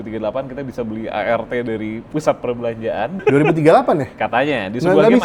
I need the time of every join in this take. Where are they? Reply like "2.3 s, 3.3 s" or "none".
2.0 s, 3.2 s